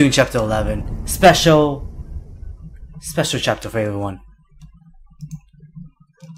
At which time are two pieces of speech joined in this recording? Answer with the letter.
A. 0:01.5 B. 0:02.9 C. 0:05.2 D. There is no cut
C